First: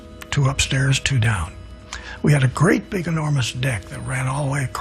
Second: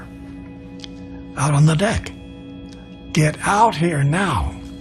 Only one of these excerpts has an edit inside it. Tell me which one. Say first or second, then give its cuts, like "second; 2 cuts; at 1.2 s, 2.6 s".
first; 1 cut; at 1.1 s